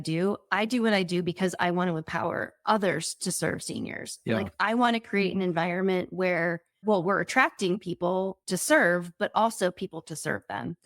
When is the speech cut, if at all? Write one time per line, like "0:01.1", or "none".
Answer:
0:06.8
0:08.4